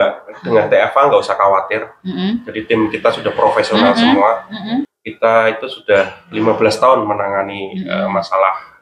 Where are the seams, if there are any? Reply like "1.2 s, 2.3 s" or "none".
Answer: 4.9 s